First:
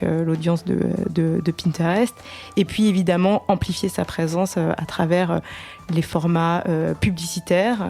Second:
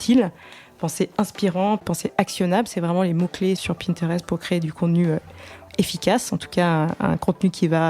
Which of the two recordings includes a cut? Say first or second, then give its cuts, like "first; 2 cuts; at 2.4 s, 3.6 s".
second; 2 cuts; at 1.8 s, 3.6 s